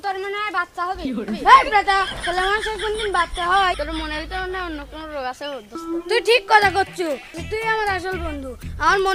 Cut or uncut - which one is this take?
uncut